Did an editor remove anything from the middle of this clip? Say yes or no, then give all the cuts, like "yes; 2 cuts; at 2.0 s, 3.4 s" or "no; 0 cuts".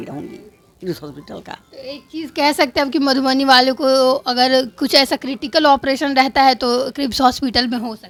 no; 0 cuts